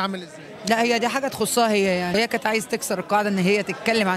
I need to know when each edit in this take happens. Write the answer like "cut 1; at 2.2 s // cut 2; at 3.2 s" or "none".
cut 1; at 2.1 s